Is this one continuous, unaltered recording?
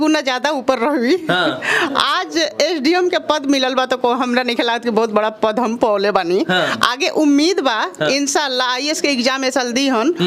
yes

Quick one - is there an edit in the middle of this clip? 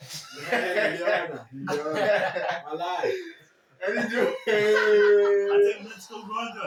no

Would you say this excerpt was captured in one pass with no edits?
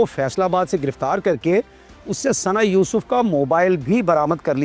yes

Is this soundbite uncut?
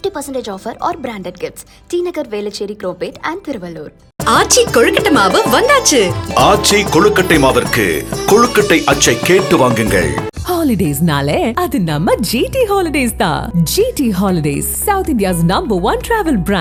yes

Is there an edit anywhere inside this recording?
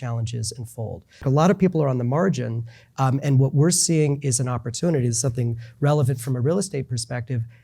yes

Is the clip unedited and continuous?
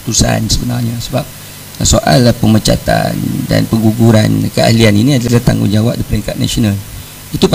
yes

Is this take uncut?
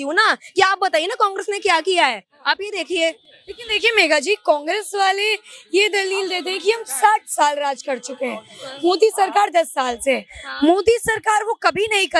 yes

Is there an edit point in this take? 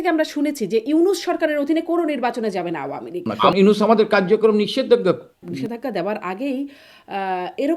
yes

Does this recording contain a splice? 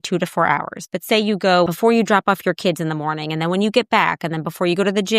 yes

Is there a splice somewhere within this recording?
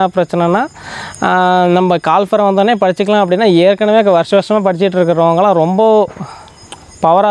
no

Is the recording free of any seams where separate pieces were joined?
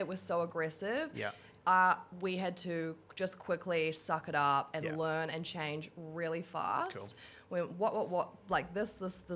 yes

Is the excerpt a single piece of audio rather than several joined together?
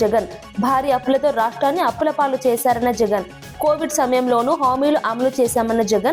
yes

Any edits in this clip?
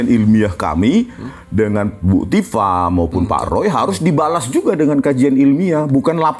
no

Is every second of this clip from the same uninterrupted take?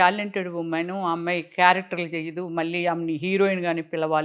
yes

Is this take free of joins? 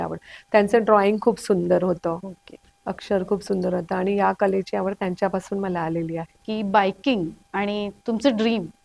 no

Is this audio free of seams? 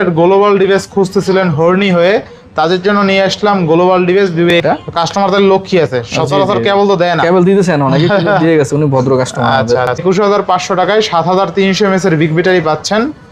no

